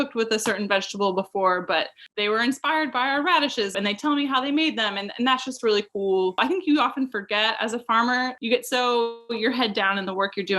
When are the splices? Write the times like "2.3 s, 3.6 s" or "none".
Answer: 2.0 s, 3.7 s, 6.4 s, 8.4 s